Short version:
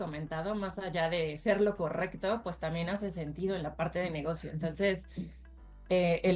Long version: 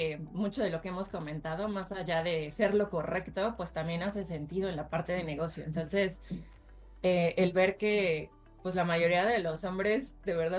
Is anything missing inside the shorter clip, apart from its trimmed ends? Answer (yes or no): no